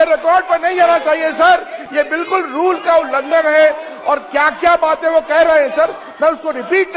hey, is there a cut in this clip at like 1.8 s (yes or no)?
no